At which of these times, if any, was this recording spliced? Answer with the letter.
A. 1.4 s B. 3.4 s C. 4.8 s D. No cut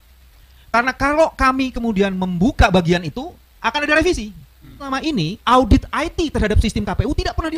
C